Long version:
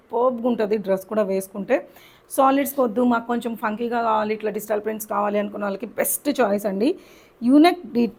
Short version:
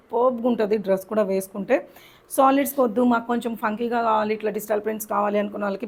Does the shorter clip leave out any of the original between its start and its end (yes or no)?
no